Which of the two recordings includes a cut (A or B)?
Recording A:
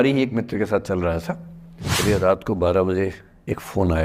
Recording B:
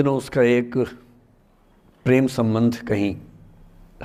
A